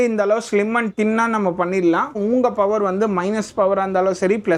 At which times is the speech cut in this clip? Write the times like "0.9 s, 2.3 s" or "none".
none